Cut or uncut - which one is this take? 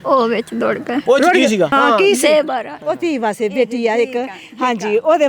cut